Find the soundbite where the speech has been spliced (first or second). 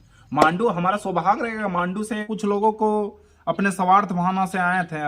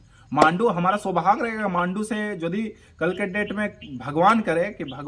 first